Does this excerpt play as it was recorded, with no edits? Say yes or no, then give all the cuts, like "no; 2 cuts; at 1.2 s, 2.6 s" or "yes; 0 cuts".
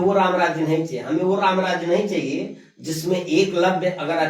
yes; 0 cuts